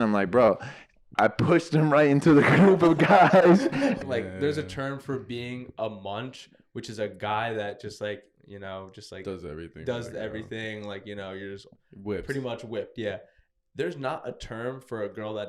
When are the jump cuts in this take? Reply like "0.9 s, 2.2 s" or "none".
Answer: 4.0 s